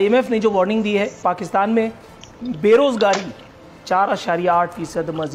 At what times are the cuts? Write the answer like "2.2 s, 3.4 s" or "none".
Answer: 1.2 s

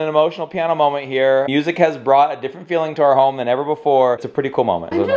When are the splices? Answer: 1.5 s, 4.3 s

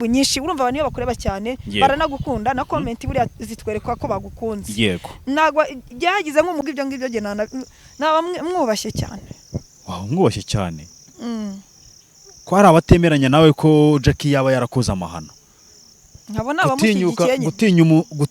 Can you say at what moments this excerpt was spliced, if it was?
6.6 s

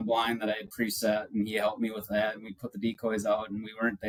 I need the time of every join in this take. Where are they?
none

